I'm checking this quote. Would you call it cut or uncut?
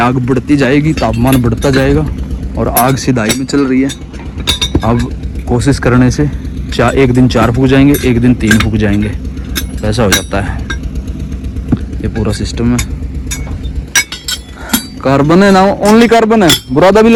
uncut